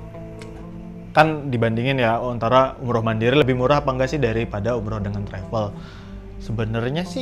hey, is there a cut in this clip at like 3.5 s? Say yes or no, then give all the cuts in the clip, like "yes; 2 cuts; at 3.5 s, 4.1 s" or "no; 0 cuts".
yes; 1 cut; at 3.5 s